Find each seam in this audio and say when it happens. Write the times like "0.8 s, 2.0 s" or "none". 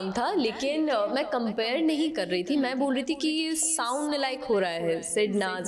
none